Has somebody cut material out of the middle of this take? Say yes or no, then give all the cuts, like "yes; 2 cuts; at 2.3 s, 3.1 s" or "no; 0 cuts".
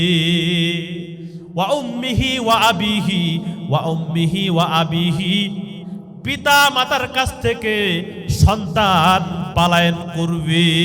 yes; 1 cut; at 1.4 s